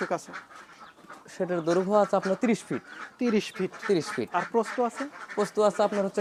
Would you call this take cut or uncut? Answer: uncut